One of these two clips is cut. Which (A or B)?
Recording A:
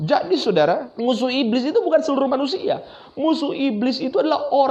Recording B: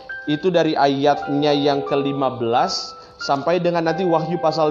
A